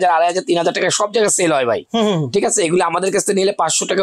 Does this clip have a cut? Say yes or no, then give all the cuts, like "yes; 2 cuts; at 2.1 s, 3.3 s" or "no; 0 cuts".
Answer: no; 0 cuts